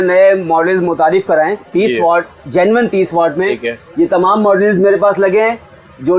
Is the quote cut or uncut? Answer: uncut